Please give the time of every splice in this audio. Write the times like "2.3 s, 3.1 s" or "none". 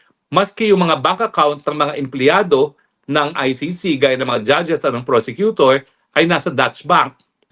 none